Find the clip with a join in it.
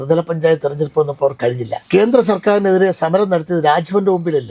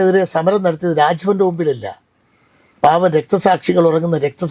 first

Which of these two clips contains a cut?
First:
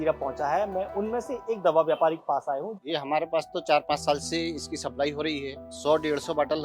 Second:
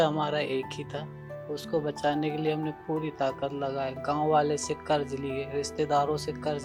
first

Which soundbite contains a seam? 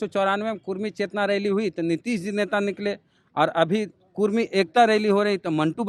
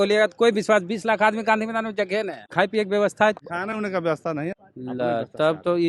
second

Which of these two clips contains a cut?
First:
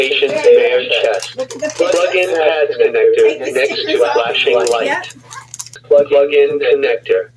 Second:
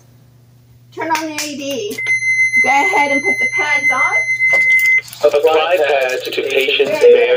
first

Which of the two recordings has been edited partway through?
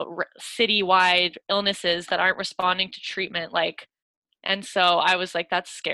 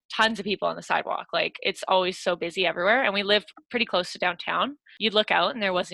second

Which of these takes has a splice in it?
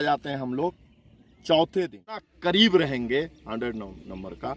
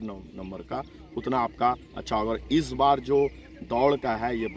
first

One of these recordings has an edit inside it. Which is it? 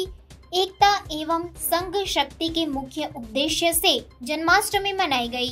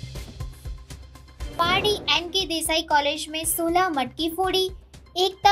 second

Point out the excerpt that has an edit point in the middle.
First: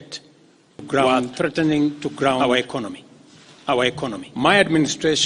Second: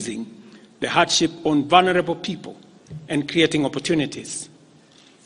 first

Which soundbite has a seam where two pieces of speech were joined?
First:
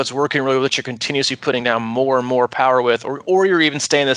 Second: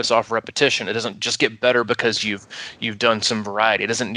second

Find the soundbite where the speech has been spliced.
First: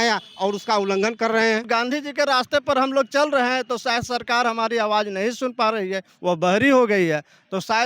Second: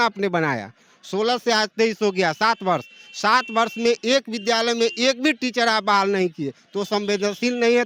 first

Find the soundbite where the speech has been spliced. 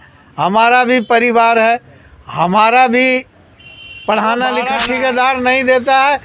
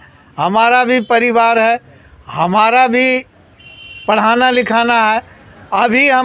first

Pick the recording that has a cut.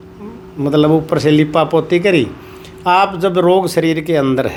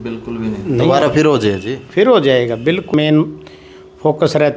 second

